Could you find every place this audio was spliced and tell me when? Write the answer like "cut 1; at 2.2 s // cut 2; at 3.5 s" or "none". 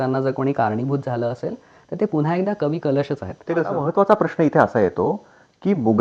cut 1; at 3.8 s

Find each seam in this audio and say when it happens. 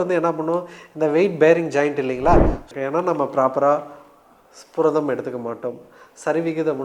cut 1; at 2.6 s

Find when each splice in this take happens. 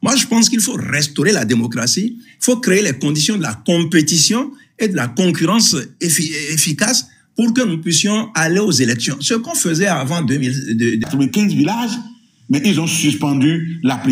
cut 1; at 11.0 s

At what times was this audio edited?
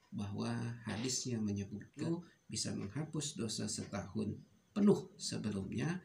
cut 1; at 2.0 s

